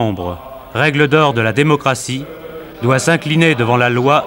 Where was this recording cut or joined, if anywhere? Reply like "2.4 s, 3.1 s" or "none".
none